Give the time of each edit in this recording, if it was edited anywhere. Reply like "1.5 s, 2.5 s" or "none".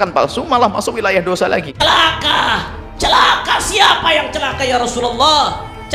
1.7 s